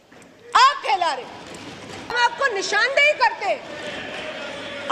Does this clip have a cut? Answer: yes; 1 cut; at 2.1 s

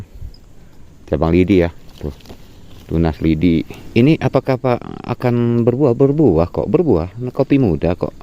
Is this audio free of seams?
no; 1 cut; at 3.8 s

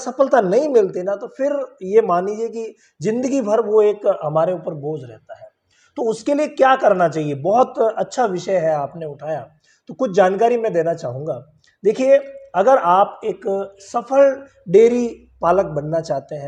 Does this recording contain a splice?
no; 0 cuts

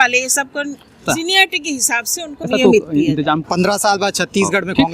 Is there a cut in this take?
yes; 3 cuts; at 1.0 s, 2.5 s, 3.5 s

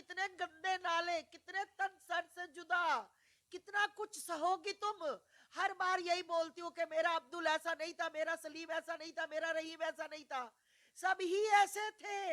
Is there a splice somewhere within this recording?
no; 0 cuts

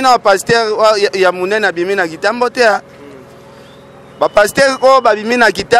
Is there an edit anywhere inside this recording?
no; 0 cuts

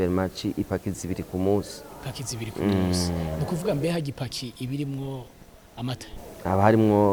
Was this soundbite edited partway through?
no; 0 cuts

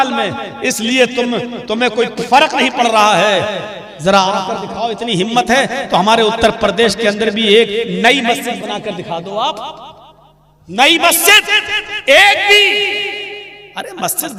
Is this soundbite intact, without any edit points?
yes; 0 cuts

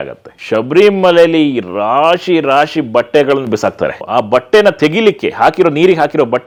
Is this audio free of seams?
yes; 0 cuts

